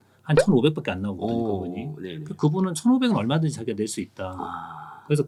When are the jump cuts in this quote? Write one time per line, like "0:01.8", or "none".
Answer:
none